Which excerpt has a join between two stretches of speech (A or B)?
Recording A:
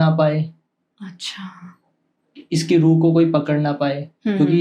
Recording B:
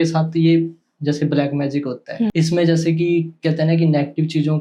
B